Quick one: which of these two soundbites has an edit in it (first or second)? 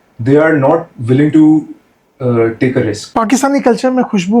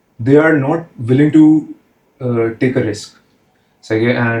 first